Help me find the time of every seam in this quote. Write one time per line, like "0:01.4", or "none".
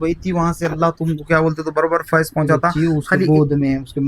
0:02.7